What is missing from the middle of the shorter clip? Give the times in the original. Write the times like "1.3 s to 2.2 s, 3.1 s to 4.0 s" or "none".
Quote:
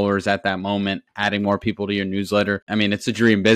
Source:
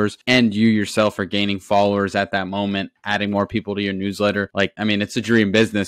4.5 s to 4.7 s

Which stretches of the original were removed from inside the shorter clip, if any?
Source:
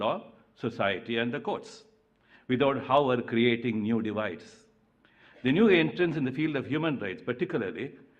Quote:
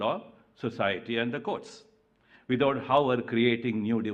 none

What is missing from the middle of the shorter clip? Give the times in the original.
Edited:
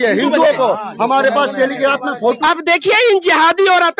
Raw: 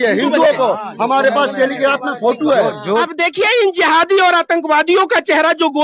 2.4 s to 3.0 s

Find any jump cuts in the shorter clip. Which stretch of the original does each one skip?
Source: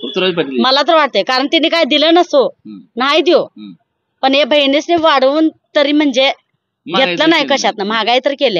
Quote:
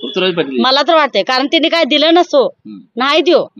none

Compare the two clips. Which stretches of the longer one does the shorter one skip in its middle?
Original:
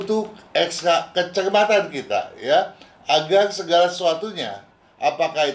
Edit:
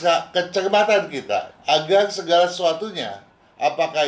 2.3 s to 2.9 s

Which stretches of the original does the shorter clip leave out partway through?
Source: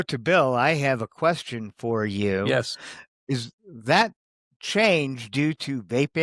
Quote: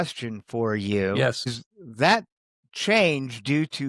2.5 s to 3.0 s

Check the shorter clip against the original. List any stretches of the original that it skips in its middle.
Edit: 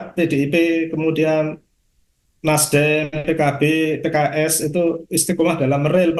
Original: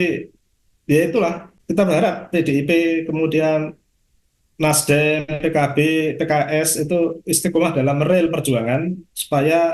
none

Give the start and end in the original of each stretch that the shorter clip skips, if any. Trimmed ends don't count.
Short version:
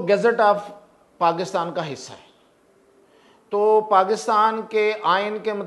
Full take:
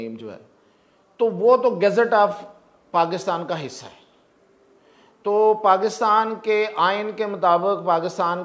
none

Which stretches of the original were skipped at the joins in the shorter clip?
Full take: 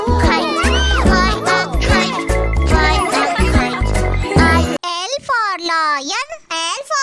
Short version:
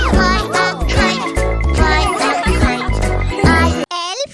none

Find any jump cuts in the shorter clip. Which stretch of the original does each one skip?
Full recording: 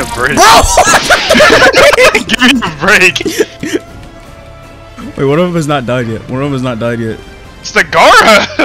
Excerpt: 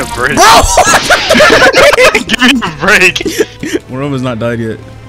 3.9 s to 6.3 s

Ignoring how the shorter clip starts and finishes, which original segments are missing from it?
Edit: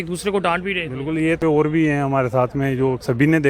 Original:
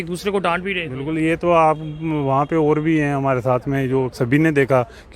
1.4 s to 2.5 s

